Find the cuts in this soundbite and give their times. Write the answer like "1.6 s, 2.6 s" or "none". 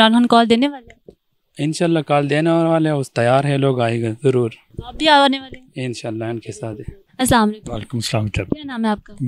none